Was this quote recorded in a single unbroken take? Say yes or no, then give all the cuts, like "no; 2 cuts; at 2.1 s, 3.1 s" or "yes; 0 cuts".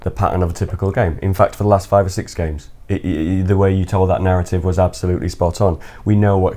yes; 0 cuts